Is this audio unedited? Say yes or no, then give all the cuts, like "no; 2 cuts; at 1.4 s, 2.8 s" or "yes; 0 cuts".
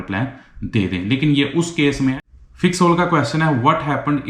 no; 1 cut; at 2.2 s